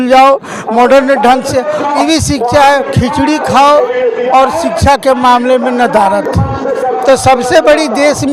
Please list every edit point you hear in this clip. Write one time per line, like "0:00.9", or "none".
none

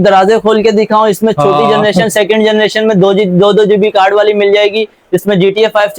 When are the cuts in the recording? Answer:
none

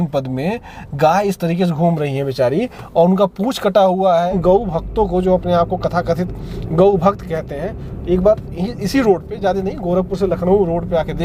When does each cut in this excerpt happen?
0:04.3

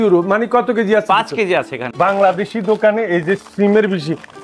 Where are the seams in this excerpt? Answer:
0:01.8

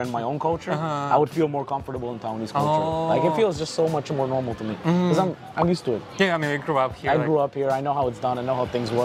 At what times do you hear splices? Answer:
none

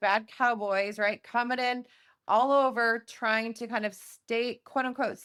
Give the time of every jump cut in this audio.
none

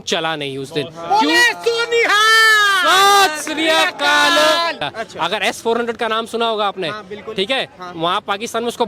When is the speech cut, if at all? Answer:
0:04.8

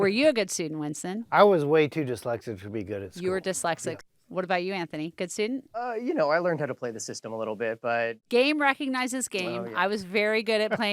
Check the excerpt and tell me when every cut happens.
0:04.0
0:05.8
0:08.2

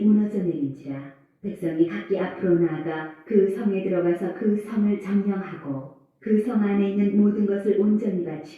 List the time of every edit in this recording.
0:05.9

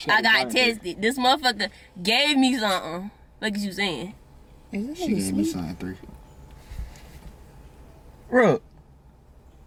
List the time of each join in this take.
none

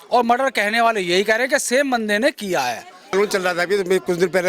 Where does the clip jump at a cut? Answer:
0:03.1

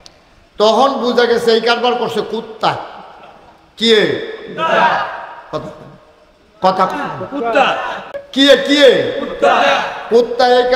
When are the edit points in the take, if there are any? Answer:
0:08.0

